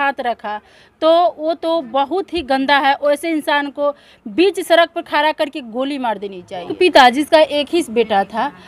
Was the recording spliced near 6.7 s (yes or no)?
yes